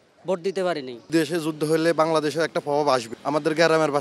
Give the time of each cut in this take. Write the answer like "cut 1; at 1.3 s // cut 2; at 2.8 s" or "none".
cut 1; at 1.1 s // cut 2; at 3.1 s